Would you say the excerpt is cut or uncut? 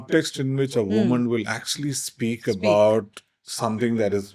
uncut